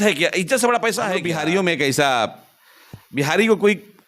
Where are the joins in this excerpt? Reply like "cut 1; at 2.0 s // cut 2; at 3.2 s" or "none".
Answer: cut 1; at 1.2 s